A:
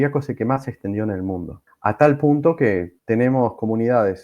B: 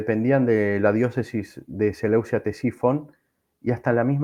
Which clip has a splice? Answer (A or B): A